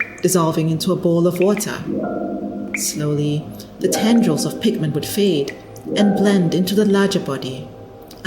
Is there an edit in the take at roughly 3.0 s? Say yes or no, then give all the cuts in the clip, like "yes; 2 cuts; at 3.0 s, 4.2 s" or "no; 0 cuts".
yes; 2 cuts; at 1.8 s, 3.0 s